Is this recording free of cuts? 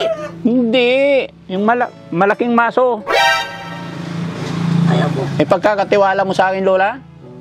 yes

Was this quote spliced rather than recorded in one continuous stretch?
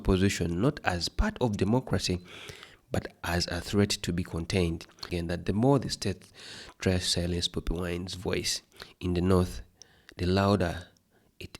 yes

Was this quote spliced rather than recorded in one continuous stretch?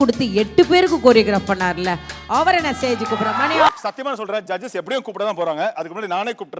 yes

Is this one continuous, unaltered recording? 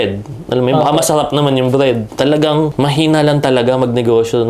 no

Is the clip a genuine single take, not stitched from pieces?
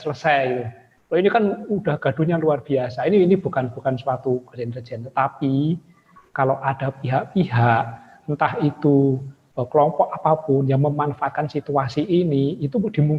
yes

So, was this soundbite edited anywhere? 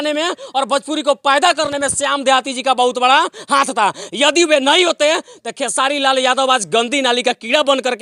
no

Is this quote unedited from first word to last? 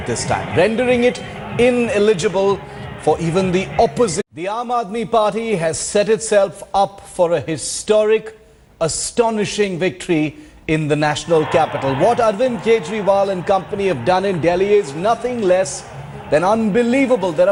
yes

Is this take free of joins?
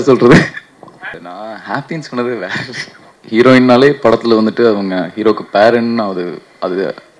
no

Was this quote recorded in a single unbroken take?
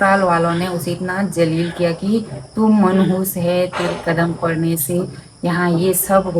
yes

